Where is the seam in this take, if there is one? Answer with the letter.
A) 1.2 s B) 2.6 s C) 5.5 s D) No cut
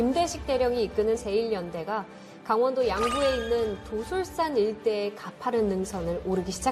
A